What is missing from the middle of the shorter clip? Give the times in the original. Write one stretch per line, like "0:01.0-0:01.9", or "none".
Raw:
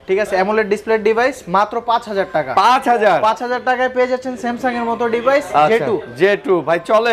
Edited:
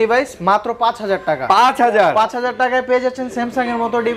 none